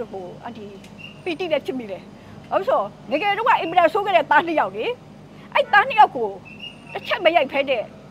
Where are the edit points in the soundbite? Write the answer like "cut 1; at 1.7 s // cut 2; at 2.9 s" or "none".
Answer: none